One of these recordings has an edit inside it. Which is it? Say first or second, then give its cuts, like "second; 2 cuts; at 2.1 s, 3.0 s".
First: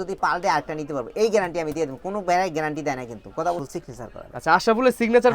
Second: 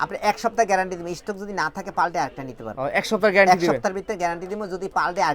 first; 1 cut; at 3.6 s